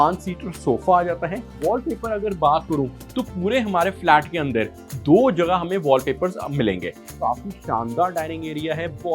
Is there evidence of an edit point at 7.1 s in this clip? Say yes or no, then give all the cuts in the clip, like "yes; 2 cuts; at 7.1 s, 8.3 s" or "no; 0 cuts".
yes; 2 cuts; at 1.5 s, 7.1 s